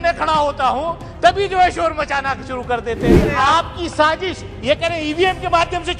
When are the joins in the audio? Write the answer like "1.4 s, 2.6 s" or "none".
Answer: 3.3 s